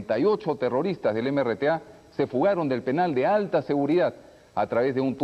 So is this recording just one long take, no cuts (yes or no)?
yes